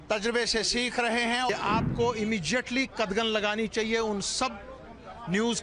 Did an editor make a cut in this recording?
yes; 1 cut; at 1.5 s

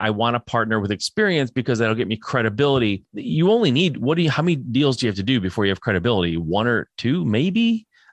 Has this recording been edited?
yes; 1 cut; at 3.1 s

